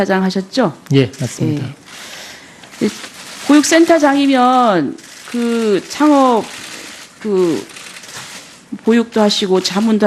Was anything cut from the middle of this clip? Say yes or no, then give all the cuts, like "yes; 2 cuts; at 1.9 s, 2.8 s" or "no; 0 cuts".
no; 0 cuts